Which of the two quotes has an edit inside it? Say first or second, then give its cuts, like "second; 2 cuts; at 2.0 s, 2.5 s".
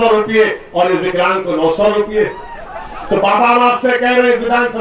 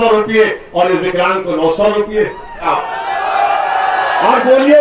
second; 1 cut; at 2.6 s